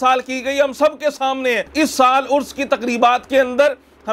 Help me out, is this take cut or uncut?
cut